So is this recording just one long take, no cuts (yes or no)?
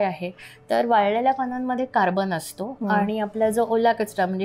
yes